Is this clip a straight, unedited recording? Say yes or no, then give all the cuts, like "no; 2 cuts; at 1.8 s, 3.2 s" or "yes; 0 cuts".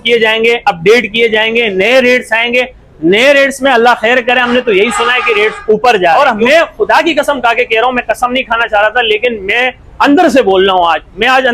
no; 1 cut; at 6.1 s